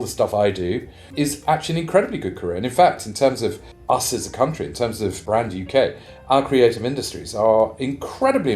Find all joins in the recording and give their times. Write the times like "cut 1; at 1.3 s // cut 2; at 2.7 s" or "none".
cut 1; at 1.1 s // cut 2; at 3.7 s // cut 3; at 5.2 s